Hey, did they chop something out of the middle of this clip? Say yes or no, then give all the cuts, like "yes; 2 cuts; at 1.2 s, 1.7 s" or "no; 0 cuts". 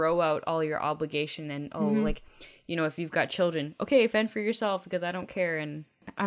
no; 0 cuts